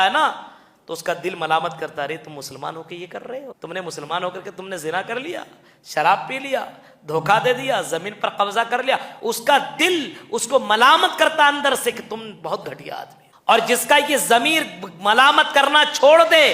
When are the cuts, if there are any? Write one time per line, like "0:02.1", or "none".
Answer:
0:03.5
0:13.2